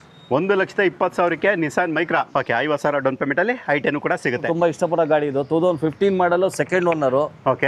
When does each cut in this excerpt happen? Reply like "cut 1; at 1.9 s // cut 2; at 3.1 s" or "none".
cut 1; at 2.1 s // cut 2; at 4.4 s